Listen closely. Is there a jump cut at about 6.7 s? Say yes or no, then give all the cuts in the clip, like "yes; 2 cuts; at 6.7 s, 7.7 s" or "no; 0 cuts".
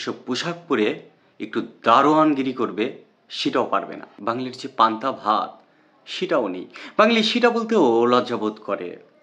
no; 1 cut; at 4.0 s